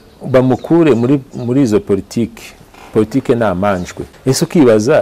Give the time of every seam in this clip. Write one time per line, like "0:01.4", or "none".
0:04.1